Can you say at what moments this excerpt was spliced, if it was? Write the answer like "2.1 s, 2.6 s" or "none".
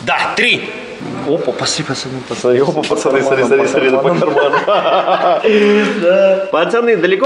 1.0 s